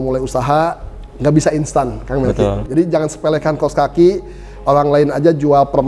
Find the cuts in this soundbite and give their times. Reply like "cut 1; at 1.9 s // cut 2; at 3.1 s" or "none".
cut 1; at 2.6 s